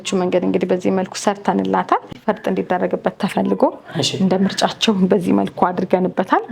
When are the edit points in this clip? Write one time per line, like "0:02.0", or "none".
0:02.1